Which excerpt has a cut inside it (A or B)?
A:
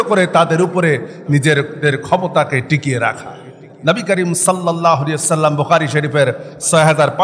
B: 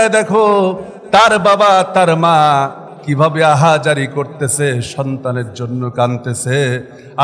A